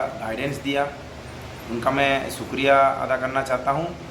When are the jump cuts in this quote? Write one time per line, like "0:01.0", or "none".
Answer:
none